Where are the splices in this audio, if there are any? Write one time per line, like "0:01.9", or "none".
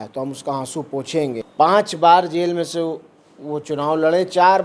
0:01.5